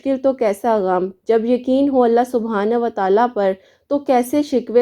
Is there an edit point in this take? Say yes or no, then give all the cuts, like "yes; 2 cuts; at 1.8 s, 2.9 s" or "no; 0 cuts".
no; 0 cuts